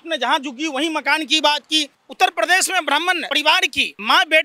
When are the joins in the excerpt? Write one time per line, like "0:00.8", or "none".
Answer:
0:02.0
0:03.5